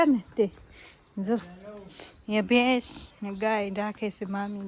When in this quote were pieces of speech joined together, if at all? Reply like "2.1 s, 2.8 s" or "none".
none